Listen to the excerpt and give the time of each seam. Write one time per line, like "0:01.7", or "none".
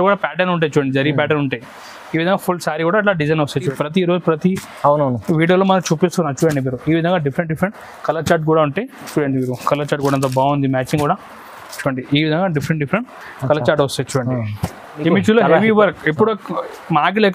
0:03.6
0:15.0

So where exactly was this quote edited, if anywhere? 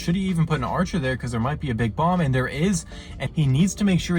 0:03.1

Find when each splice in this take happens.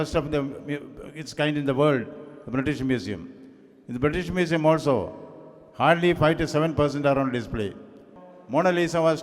0:08.1

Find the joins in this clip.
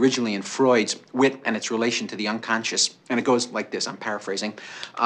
0:02.9

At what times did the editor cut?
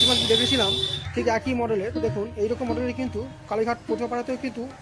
none

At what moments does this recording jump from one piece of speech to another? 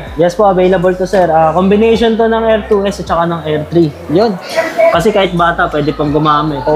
0:04.5

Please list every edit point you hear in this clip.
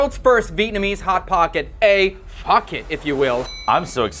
none

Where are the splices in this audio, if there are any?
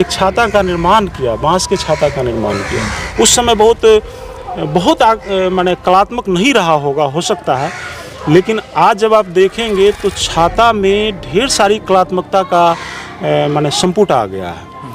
none

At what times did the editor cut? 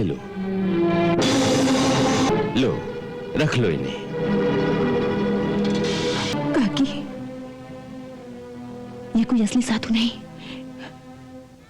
0:02.3
0:06.4

